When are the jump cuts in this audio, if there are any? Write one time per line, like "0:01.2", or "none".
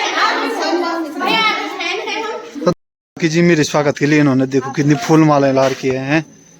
0:02.7